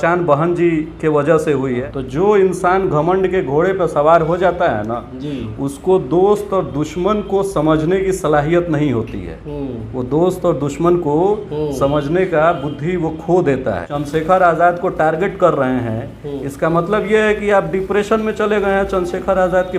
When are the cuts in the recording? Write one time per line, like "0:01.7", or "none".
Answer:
0:01.8
0:13.9